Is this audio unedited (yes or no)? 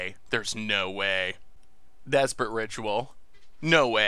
yes